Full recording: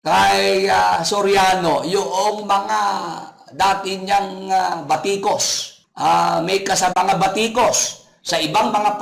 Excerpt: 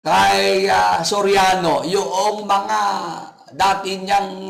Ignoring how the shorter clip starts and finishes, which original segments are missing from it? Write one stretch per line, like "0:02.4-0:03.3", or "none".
none

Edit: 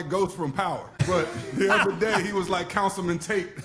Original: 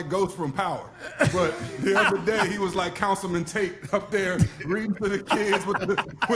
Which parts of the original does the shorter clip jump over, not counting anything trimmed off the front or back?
0:01.0-0:01.3

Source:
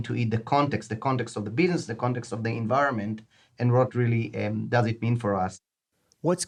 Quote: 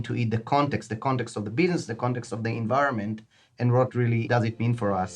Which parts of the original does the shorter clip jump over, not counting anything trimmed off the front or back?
0:04.2-0:04.7

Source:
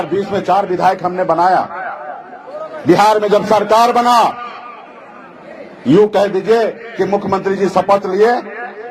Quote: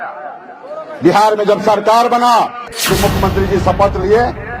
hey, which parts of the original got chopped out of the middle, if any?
0:04.6-0:06.8

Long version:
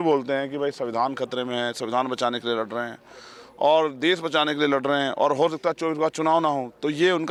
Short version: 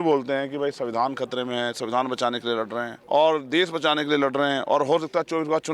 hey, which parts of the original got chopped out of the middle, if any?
0:02.9-0:03.4

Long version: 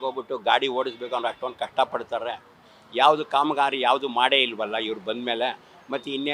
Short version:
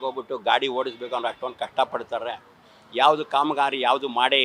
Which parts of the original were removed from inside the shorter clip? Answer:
none

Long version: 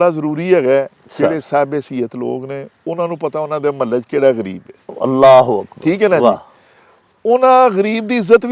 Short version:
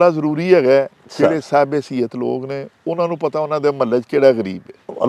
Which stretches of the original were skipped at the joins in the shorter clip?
none

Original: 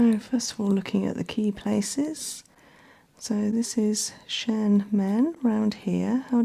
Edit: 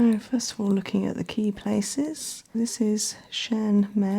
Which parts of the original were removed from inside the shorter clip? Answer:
0:02.5-0:03.5

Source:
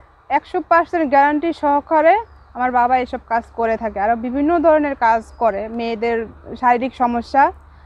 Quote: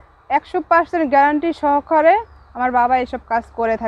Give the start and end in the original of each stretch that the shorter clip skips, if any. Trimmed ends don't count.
none

